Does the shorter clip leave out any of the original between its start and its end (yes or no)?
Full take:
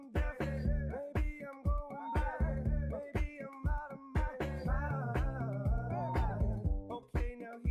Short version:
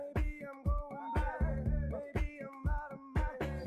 no